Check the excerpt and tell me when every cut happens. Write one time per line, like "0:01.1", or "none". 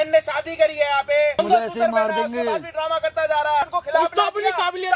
0:01.3
0:03.7